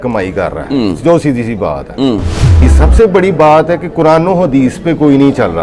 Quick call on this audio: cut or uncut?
cut